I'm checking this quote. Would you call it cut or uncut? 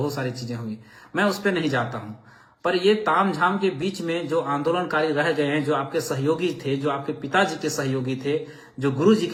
uncut